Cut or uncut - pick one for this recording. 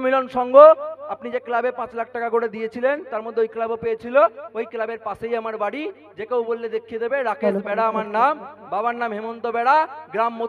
uncut